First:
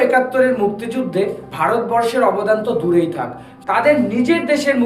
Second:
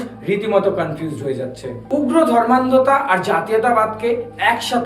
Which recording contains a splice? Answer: second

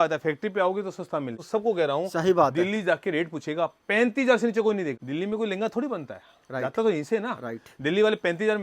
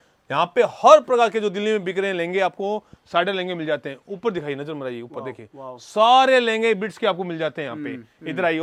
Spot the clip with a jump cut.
first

